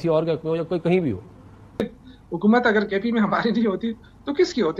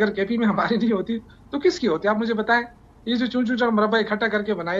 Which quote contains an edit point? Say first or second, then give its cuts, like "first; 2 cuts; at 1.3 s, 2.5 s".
first; 1 cut; at 1.8 s